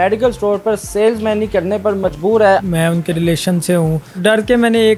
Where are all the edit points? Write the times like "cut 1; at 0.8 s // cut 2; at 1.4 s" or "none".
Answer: cut 1; at 2.6 s // cut 2; at 4.2 s